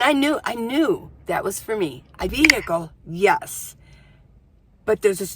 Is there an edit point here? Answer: yes; 1 cut; at 2.3 s

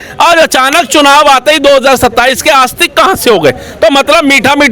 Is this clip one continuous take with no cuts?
yes; 0 cuts

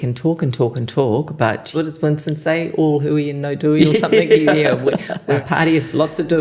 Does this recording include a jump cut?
yes; 2 cuts; at 1.7 s, 5.4 s

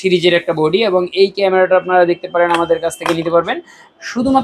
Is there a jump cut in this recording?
no; 0 cuts

